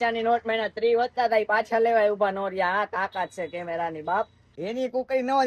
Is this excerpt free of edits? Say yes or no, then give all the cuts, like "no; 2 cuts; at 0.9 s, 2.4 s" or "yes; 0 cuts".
no; 1 cut; at 4.5 s